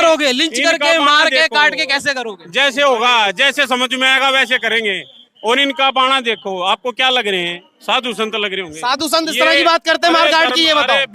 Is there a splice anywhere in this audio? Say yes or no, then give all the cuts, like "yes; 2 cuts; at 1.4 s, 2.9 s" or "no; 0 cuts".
no; 0 cuts